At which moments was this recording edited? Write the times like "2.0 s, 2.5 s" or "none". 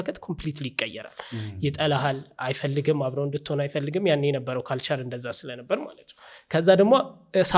none